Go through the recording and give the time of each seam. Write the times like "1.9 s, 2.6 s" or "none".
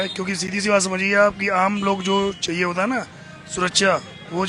none

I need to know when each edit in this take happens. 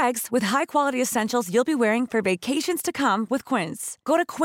none

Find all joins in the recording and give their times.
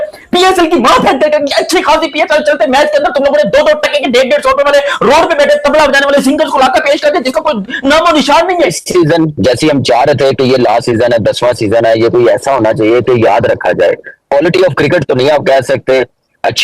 8.8 s

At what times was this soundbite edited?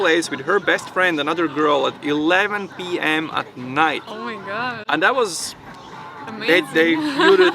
none

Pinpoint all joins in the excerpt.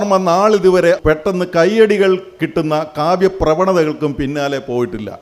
1.0 s

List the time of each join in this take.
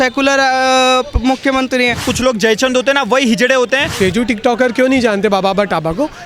2.1 s, 3.9 s

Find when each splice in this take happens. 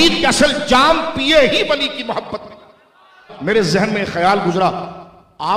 3.3 s

